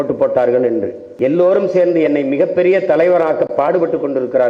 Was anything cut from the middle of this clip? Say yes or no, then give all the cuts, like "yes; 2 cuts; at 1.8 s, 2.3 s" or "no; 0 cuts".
yes; 1 cut; at 1.0 s